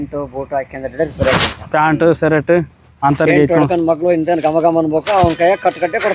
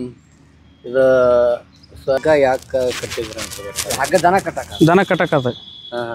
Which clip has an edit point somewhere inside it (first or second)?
second